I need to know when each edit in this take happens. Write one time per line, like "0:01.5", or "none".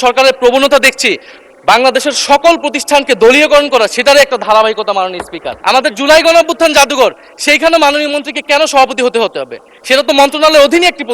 0:05.5